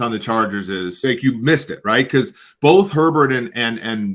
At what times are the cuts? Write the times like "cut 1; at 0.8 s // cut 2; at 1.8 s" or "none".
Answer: cut 1; at 1.0 s